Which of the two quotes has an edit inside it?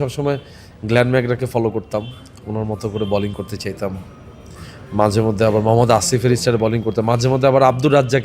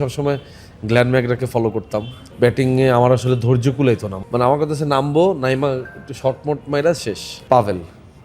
second; 3 cuts; at 2.2 s, 4.1 s, 7.3 s

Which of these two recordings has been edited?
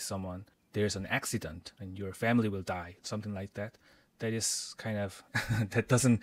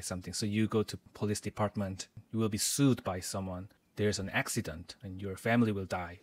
second; 1 cut; at 2.2 s

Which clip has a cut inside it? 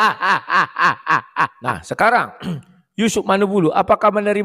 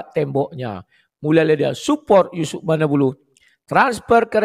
first; 1 cut; at 1.6 s

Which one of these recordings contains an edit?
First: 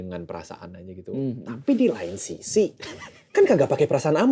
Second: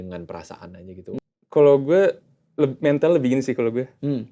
second; 1 cut; at 1.2 s

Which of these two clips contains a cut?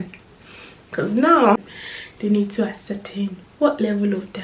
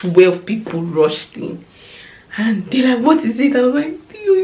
first; 1 cut; at 1.6 s

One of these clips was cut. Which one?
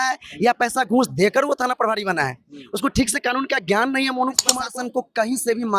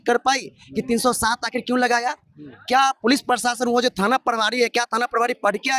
first; 1 cut; at 4.5 s

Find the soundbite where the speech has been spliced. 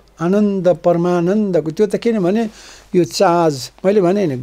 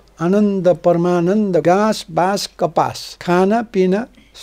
second; 2 cuts; at 1.6 s, 3.1 s

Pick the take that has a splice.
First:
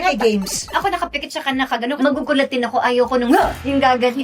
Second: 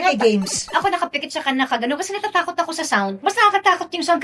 first; 1 cut; at 2.0 s

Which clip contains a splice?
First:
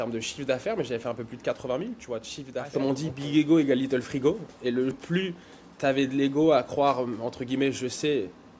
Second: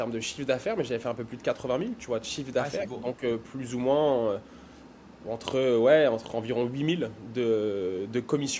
first; 2 cuts; at 2.7 s, 5.0 s

